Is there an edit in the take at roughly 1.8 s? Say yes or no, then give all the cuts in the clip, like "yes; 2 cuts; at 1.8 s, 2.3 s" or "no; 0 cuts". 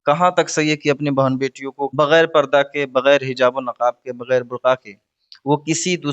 yes; 1 cut; at 1.8 s